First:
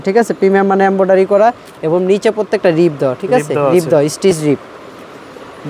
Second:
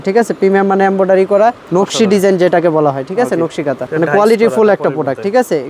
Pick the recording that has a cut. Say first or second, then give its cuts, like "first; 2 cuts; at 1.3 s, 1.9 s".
second; 2 cuts; at 1.6 s, 3.9 s